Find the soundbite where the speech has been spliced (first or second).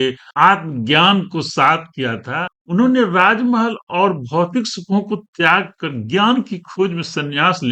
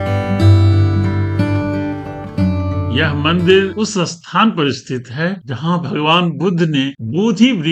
first